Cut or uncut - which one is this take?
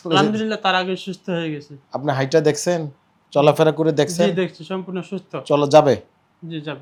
uncut